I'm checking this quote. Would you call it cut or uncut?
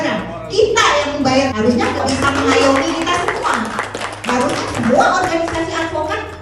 cut